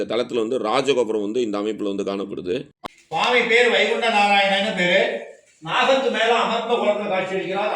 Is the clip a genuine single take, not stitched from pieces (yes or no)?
no